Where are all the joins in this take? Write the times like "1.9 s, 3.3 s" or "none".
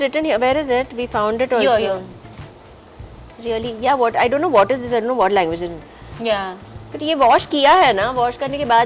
none